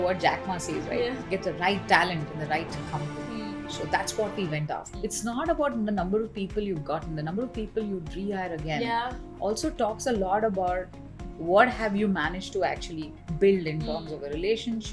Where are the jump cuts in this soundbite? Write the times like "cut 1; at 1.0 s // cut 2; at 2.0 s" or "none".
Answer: cut 1; at 4.9 s